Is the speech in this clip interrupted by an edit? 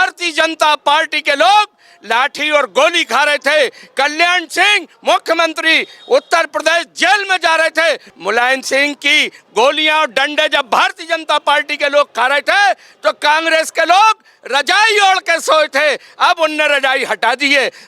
yes; 1 cut; at 8.1 s

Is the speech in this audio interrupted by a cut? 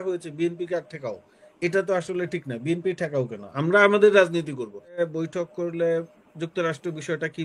yes; 1 cut; at 5.0 s

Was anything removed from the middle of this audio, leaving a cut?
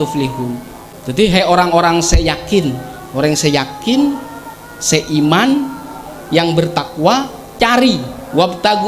no; 0 cuts

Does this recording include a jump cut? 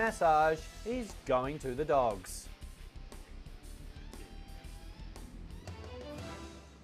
yes; 1 cut; at 1.5 s

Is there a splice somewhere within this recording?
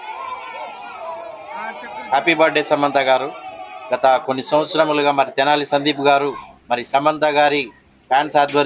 yes; 1 cut; at 2.1 s

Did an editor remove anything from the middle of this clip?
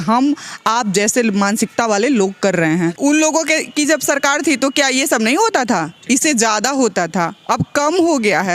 yes; 1 cut; at 3.0 s

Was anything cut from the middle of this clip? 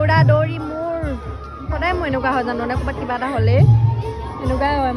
no; 0 cuts

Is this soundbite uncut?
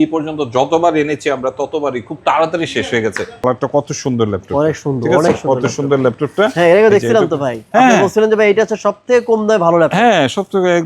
no; 1 cut; at 3.4 s

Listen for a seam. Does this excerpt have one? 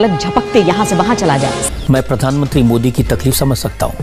yes; 1 cut; at 1.6 s

